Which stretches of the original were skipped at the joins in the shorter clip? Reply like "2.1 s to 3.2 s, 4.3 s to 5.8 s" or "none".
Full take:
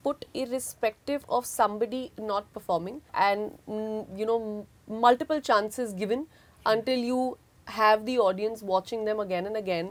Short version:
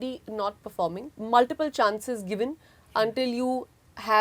3.0 s to 4.8 s